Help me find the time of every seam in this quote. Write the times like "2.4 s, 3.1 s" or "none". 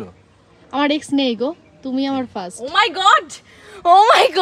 none